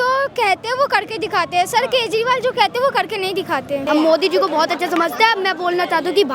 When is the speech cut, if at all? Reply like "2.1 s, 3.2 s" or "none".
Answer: 3.9 s

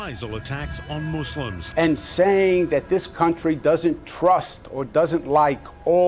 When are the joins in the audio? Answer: none

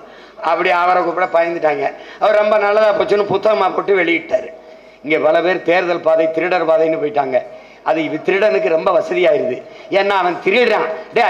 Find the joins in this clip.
4.7 s

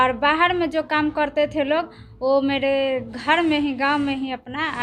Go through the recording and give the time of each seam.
none

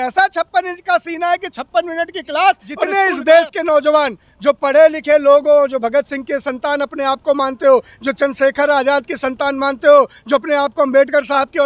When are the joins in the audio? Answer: 2.9 s

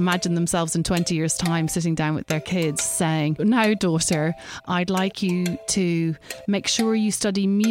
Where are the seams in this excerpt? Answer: 3.4 s, 4.6 s

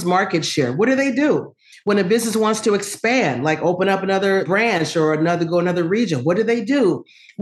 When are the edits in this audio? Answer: 4.4 s

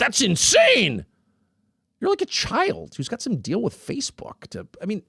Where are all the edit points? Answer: none

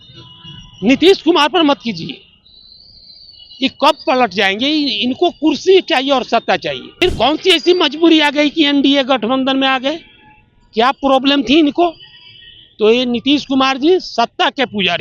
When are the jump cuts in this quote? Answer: 7.0 s

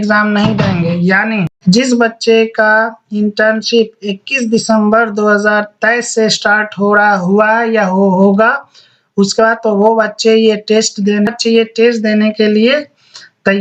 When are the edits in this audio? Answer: 1.5 s, 11.3 s

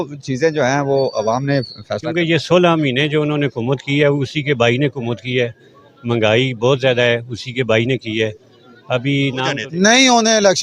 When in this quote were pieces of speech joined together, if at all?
2.1 s, 9.5 s

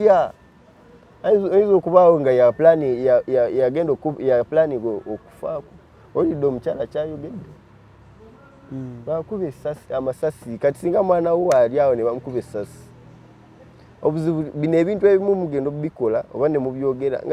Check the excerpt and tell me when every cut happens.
none

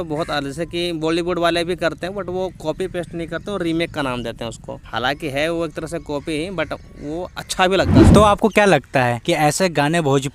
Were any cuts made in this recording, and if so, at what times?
8.1 s, 9.2 s

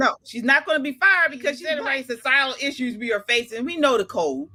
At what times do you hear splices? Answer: none

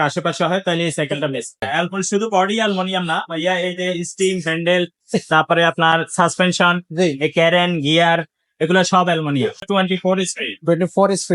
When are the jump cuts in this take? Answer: 1.7 s, 9.7 s

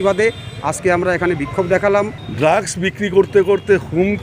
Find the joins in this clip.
2.2 s

